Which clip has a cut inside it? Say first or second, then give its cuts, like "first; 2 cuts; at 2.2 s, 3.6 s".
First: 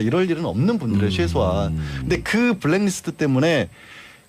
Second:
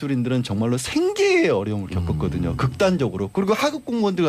first; 1 cut; at 1.0 s